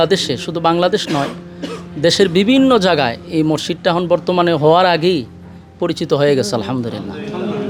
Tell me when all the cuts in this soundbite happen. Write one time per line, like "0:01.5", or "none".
none